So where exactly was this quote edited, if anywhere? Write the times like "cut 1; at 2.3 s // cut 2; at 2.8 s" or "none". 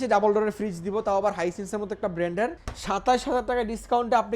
cut 1; at 2.7 s